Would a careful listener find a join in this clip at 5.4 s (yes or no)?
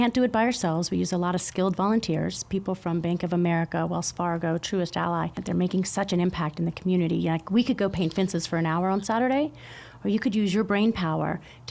yes